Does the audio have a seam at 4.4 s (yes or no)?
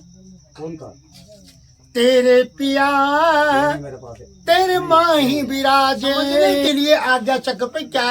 no